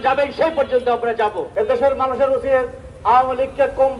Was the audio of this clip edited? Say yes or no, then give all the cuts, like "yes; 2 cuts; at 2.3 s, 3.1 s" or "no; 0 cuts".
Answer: yes; 1 cut; at 1.4 s